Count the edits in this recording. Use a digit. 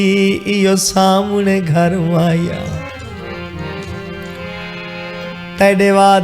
0